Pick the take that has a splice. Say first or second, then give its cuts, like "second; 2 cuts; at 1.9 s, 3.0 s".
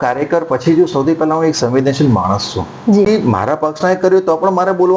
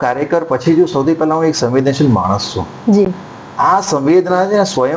first; 1 cut; at 3.1 s